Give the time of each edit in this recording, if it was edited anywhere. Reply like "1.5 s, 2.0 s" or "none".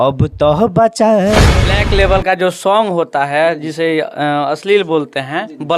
1.5 s

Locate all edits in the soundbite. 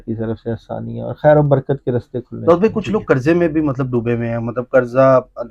2.2 s

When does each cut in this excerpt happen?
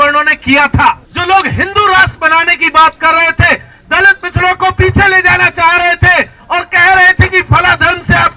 1.1 s

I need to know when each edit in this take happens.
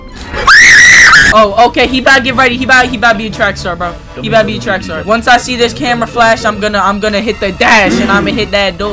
1.3 s

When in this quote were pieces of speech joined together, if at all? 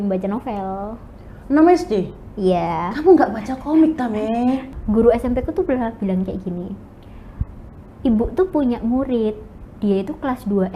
4.7 s

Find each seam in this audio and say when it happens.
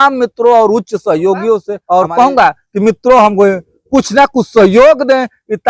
1.7 s

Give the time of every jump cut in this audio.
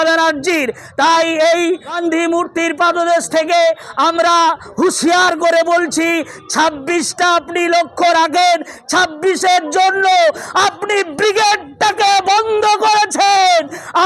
2.0 s

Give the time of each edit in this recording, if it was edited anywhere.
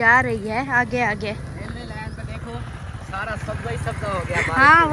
none

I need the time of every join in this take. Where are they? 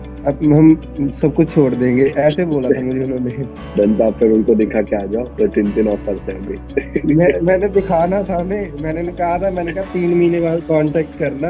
none

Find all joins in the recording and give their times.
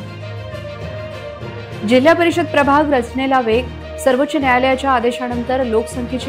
1.0 s

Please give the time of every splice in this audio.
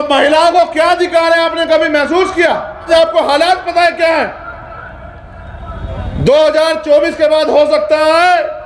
2.9 s

